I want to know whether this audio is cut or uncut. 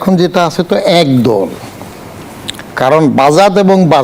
uncut